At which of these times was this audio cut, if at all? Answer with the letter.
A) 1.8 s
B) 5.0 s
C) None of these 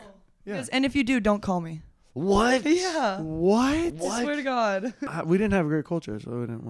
B